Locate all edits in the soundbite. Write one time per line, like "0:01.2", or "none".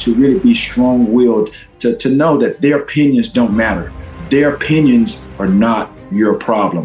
0:04.1